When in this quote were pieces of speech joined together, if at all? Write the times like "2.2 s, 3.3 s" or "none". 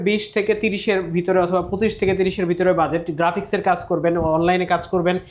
none